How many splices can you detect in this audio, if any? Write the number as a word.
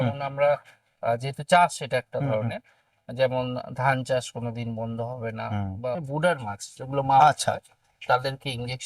one